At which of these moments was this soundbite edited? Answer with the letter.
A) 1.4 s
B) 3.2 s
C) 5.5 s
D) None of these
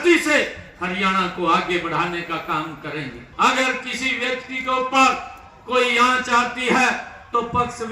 B